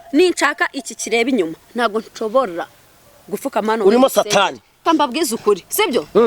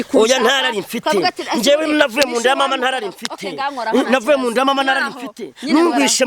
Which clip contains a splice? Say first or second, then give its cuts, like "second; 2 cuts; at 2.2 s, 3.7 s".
first; 1 cut; at 4.7 s